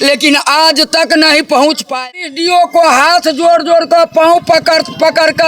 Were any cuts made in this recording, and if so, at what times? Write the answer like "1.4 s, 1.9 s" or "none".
2.1 s